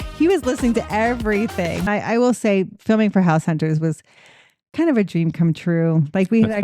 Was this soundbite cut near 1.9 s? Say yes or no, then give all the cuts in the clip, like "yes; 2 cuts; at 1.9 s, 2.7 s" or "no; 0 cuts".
yes; 1 cut; at 1.9 s